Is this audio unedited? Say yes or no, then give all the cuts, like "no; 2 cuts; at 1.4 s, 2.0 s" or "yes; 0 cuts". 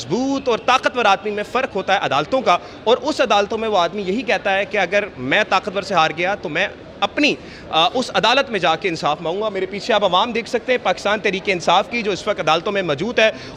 yes; 0 cuts